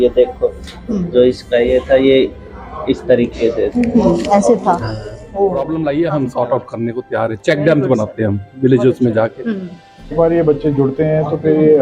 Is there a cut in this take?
yes; 2 cuts; at 5.6 s, 10.1 s

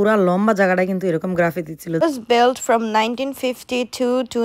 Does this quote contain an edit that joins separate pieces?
yes; 1 cut; at 2.0 s

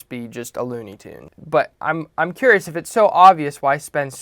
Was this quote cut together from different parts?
yes; 1 cut; at 1.2 s

